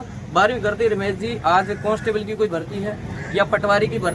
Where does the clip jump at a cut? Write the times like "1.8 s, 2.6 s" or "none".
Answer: none